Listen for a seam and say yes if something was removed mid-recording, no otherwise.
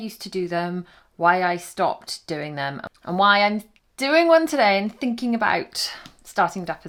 no